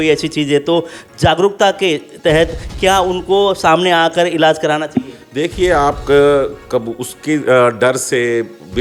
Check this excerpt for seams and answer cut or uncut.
uncut